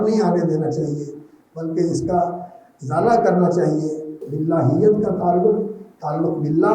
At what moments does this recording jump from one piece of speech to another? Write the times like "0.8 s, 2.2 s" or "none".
4.2 s